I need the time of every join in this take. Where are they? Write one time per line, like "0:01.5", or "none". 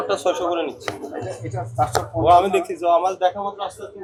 none